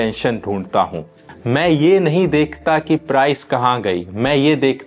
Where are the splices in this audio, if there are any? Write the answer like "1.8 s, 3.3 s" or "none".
1.2 s